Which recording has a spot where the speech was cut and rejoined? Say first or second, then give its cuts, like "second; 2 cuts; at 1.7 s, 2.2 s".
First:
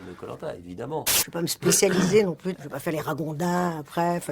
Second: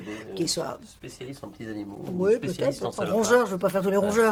first; 2 cuts; at 1.2 s, 2.6 s